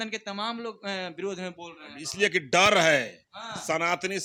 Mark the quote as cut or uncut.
uncut